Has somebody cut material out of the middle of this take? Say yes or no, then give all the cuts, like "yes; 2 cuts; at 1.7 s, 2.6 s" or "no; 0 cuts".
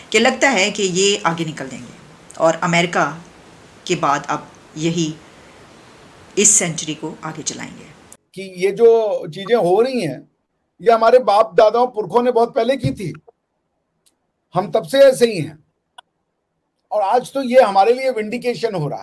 yes; 1 cut; at 8.2 s